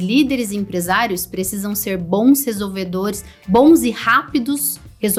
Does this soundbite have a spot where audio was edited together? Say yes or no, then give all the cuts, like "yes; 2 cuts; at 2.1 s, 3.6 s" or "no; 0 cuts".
no; 0 cuts